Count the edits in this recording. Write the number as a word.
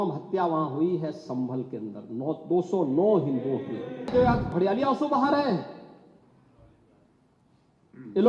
one